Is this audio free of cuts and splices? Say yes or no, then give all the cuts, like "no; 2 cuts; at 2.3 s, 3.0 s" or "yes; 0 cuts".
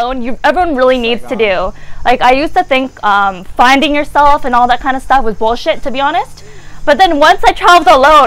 yes; 0 cuts